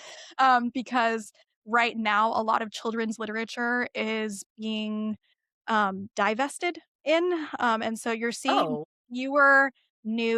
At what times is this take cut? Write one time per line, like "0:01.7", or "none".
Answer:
none

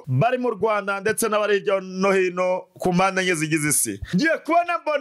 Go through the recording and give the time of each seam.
0:04.1

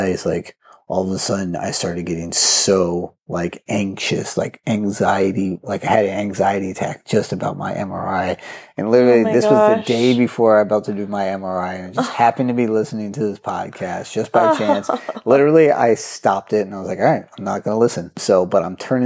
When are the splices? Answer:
0:18.2

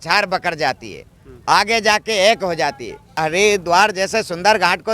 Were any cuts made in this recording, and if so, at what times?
0:03.1

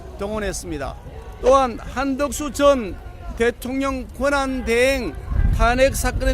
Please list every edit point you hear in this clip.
0:01.2

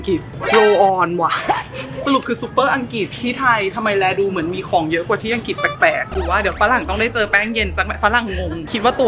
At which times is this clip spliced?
0:01.9
0:06.1

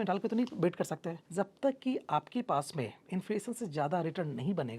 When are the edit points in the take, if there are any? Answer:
0:01.2

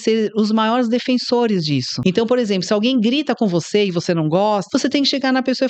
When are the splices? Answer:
0:01.9
0:04.6

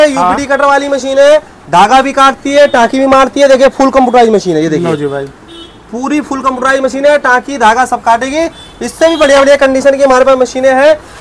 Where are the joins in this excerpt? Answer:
none

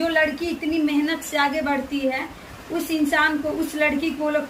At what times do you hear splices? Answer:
none

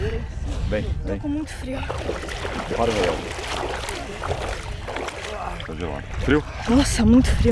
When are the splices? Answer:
none

